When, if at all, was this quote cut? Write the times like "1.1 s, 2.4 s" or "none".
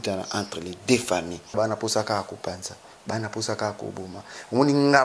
1.6 s